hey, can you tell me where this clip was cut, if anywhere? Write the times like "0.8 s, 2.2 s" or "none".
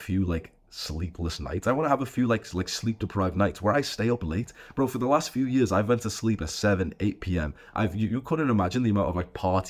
none